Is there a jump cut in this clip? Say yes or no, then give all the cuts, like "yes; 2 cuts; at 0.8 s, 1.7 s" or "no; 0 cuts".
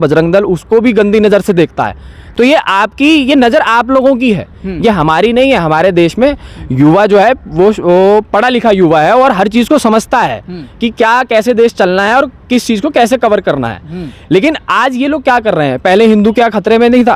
no; 0 cuts